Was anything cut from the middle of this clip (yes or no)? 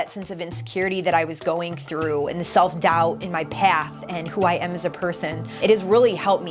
yes